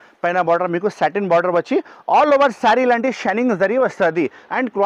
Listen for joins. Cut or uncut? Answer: uncut